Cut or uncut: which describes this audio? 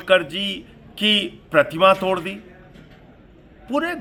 uncut